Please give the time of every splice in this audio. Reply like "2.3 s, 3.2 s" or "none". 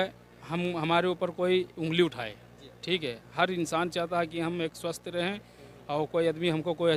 none